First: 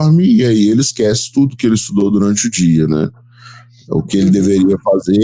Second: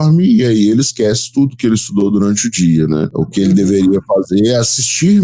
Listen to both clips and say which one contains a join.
second; 1 cut; at 3.2 s

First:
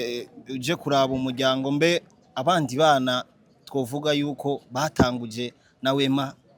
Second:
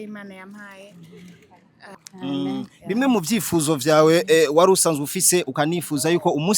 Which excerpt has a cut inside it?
second; 1 cut; at 1.9 s

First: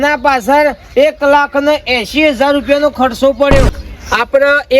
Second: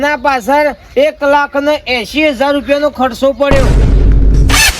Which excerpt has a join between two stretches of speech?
first; 1 cut; at 3.7 s

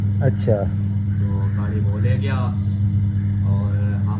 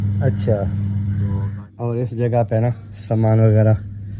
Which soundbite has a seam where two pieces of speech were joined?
second; 1 cut; at 1.5 s

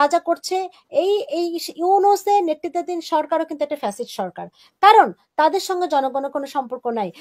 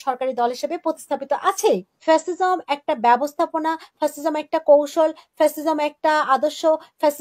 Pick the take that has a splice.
second; 1 cut; at 1.9 s

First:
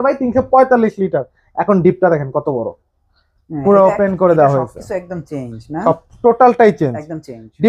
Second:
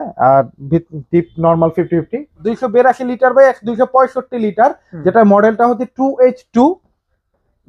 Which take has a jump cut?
second; 1 cut; at 2.5 s

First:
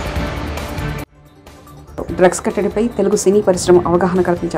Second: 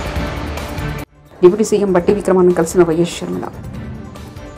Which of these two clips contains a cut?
first; 1 cut; at 1.2 s

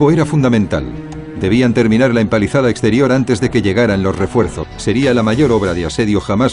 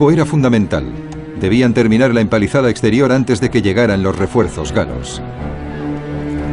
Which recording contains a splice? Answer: second; 1 cut; at 4.7 s

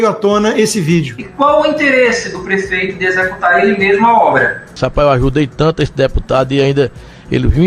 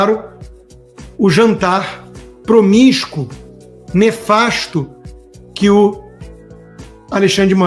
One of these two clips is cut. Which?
first; 1 cut; at 4.7 s

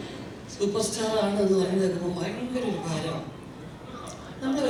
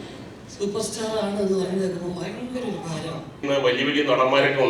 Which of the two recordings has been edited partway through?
second; 1 cut; at 3.4 s

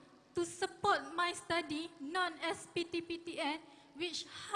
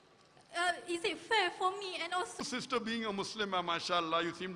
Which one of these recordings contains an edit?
second; 1 cut; at 2.4 s

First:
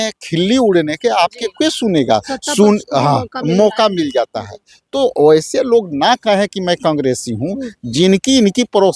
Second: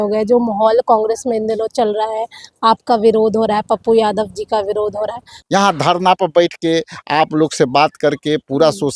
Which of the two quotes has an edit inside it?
second; 1 cut; at 5.3 s

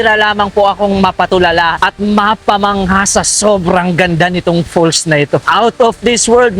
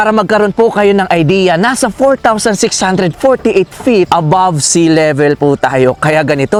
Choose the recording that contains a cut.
first; 2 cuts; at 1.7 s, 5.5 s

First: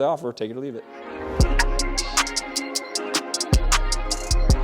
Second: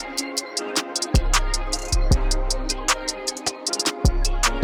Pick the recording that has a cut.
first; 1 cut; at 0.9 s

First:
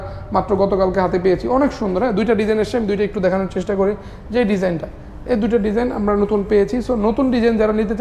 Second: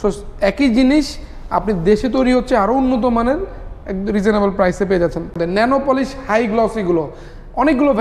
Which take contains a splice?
second; 1 cut; at 5.3 s

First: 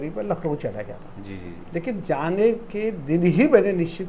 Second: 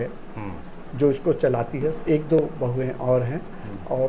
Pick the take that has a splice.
second; 1 cut; at 2.0 s

